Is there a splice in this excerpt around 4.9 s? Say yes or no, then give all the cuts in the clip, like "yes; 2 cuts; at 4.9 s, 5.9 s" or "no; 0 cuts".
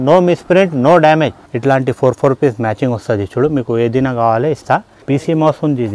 yes; 2 cuts; at 1.4 s, 4.9 s